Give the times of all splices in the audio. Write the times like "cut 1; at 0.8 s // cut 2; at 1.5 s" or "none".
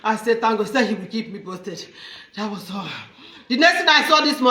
none